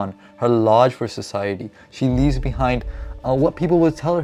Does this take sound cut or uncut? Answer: uncut